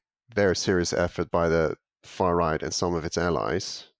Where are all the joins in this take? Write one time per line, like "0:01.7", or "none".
none